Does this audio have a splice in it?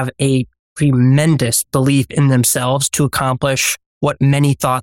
no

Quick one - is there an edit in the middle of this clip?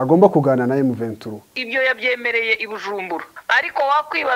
yes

